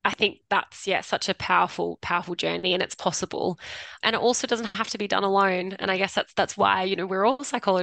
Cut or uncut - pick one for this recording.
uncut